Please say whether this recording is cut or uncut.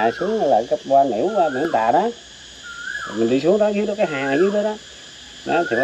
uncut